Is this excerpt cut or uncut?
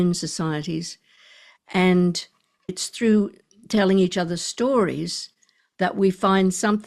cut